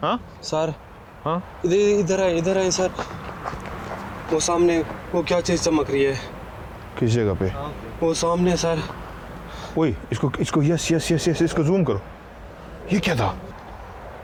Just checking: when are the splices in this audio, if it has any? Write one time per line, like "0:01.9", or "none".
none